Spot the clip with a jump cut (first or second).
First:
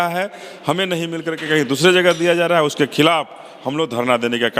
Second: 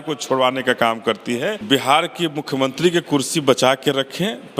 second